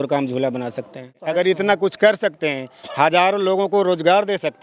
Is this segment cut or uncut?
cut